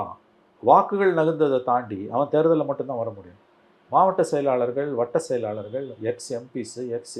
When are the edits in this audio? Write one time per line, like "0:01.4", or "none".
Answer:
none